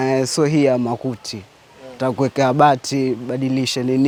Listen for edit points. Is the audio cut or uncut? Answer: uncut